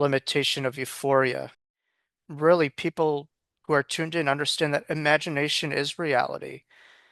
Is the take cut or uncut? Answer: cut